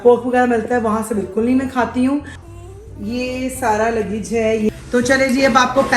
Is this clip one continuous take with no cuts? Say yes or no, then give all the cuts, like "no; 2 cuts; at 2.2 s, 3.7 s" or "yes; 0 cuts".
no; 2 cuts; at 2.4 s, 4.7 s